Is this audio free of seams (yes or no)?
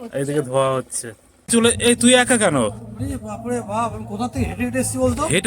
no